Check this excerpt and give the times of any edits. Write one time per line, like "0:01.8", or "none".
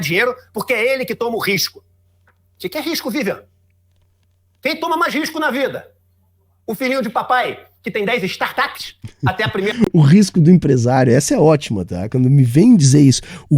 0:02.2